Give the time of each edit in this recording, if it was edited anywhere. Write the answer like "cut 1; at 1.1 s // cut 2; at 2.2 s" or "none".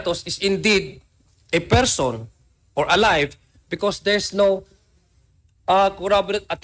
none

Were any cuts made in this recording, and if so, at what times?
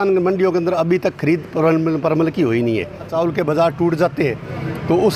cut 1; at 3.1 s

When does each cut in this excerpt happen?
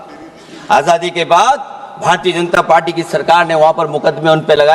none

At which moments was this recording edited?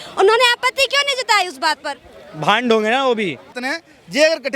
cut 1; at 3.6 s

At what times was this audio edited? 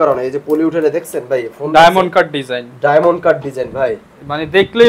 none

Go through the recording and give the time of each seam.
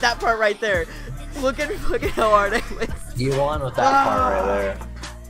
none

